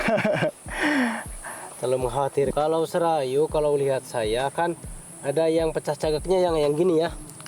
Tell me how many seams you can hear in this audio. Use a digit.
1